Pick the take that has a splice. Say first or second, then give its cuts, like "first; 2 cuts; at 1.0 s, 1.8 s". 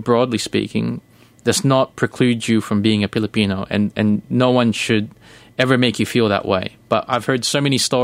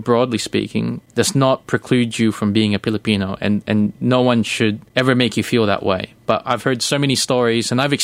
second; 2 cuts; at 1.0 s, 4.8 s